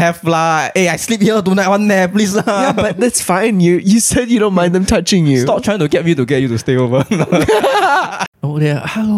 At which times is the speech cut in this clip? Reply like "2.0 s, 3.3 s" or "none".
8.2 s